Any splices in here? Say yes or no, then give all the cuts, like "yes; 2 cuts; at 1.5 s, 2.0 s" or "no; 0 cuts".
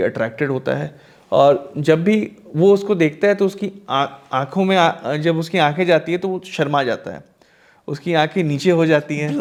no; 0 cuts